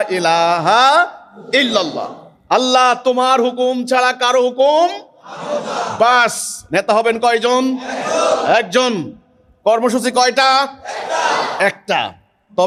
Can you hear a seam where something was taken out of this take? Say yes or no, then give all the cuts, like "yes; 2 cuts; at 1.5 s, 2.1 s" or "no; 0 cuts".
no; 0 cuts